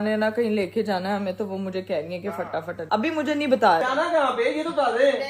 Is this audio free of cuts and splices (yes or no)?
no